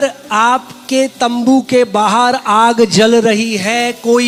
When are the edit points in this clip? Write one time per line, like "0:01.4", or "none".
none